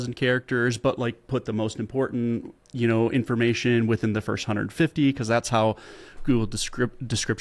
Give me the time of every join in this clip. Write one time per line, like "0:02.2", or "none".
none